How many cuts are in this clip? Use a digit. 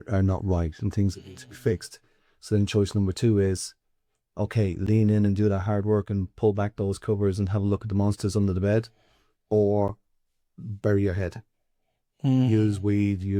0